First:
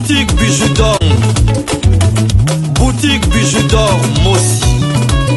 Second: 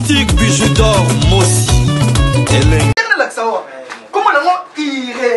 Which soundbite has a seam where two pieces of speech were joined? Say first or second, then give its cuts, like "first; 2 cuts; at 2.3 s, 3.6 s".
second; 1 cut; at 1.0 s